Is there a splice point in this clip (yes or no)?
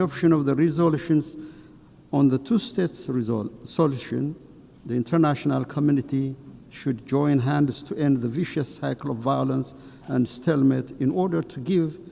no